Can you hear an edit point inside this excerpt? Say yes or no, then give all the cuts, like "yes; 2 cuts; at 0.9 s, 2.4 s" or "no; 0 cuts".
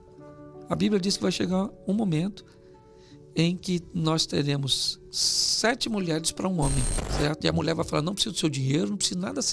yes; 1 cut; at 7.0 s